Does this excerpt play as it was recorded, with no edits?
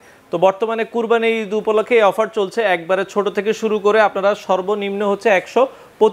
yes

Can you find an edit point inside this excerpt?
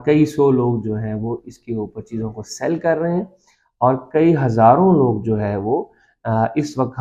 no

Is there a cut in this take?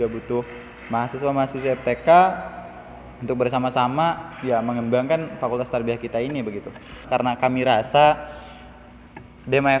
yes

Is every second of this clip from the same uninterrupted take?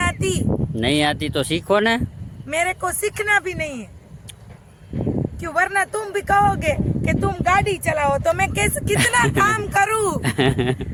yes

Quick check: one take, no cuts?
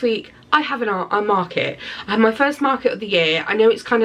yes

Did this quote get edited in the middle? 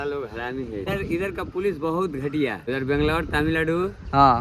yes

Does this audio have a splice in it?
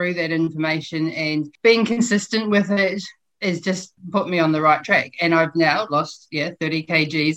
yes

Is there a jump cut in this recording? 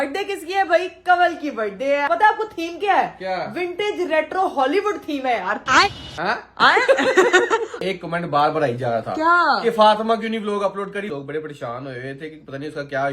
yes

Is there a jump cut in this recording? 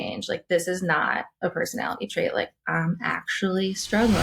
no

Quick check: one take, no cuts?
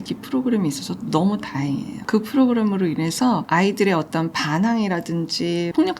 no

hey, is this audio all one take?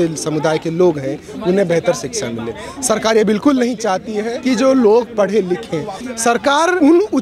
no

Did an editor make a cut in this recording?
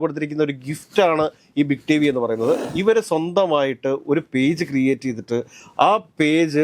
yes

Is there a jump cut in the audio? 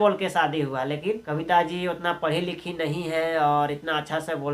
yes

